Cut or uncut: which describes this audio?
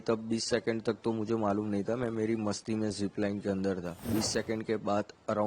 cut